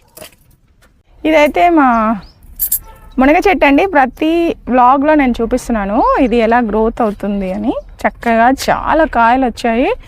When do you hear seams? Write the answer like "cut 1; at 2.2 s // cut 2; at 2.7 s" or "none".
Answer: cut 1; at 0.9 s